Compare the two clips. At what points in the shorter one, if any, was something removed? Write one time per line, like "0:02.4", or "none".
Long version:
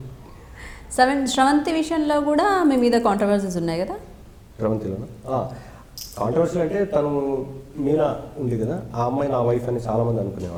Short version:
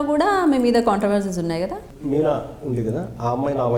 0:01.9